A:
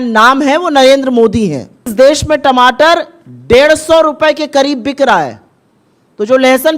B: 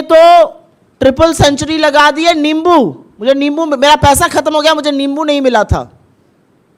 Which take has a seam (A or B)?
A